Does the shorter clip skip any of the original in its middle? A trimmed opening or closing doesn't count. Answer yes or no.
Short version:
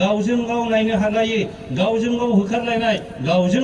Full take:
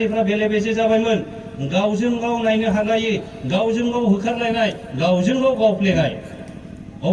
no